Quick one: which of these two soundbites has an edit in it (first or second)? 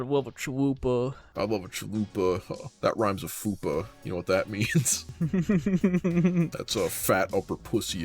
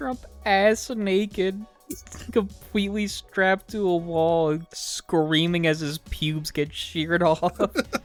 first